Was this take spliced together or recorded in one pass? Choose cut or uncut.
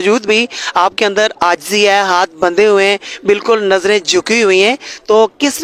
uncut